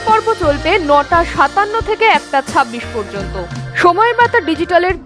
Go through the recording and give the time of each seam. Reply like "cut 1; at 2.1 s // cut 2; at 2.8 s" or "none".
cut 1; at 3.6 s